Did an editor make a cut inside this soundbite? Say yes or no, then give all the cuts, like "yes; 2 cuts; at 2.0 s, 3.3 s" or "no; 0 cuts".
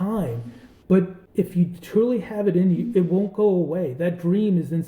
no; 0 cuts